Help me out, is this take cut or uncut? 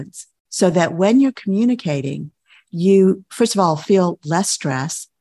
uncut